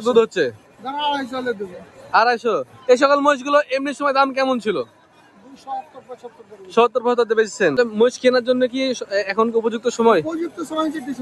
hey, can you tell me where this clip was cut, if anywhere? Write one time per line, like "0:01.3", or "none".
0:07.8